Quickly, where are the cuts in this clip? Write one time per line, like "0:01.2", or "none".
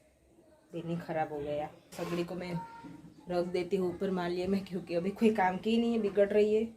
0:01.9